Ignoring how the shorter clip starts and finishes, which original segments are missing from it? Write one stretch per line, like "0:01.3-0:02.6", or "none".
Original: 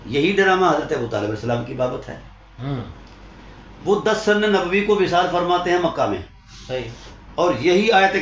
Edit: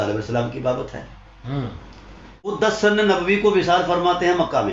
0:03.8-0:04.1